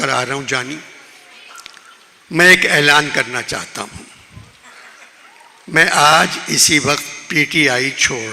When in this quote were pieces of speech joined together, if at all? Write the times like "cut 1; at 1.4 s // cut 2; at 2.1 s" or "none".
none